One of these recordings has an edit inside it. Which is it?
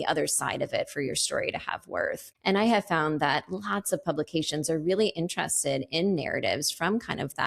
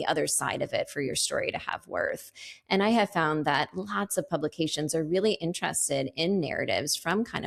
first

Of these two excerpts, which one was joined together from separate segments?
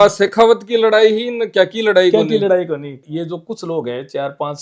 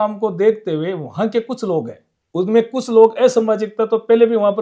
first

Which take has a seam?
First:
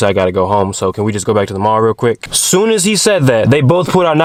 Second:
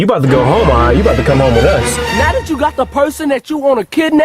second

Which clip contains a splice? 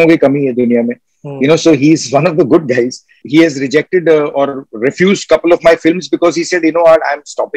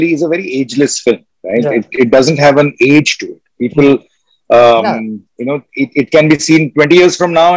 first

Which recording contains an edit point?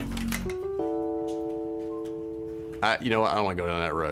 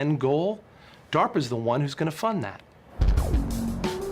second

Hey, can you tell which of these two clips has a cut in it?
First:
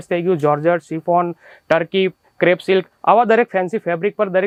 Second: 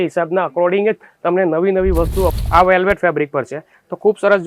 second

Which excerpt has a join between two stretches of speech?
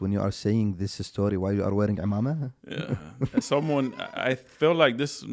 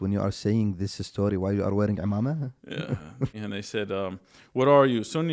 second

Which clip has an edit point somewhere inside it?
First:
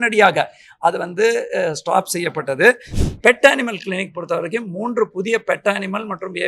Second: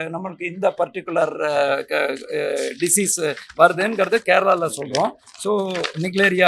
first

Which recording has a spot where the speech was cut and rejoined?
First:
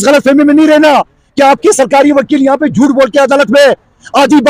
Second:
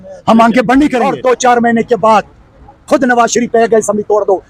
second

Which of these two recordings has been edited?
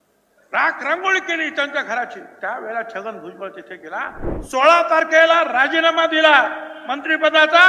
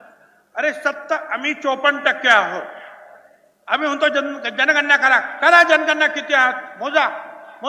first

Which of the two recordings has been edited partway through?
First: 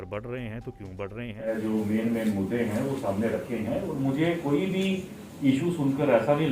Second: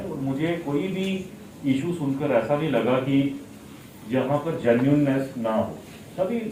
first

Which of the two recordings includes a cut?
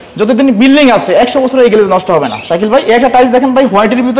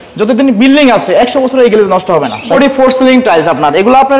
second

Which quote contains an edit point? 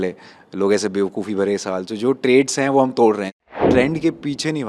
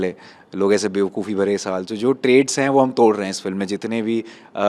first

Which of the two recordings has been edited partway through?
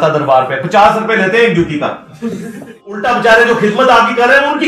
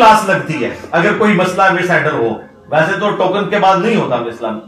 first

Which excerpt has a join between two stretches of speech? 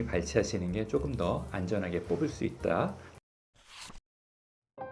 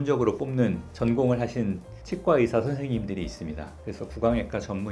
first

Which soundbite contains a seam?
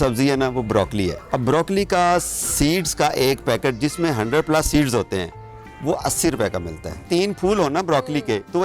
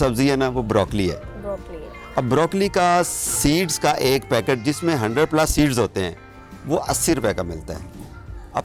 first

